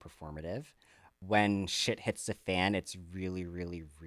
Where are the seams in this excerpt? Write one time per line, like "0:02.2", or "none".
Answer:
0:01.1